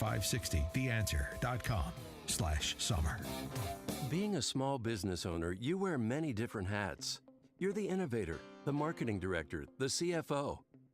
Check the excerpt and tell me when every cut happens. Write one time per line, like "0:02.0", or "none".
0:03.5